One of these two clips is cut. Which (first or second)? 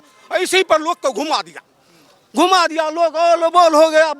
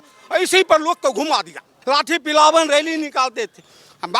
second